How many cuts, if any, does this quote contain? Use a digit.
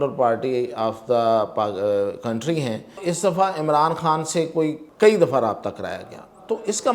2